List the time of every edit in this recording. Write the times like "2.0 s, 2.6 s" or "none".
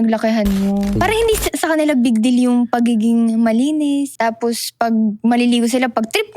1.0 s, 4.1 s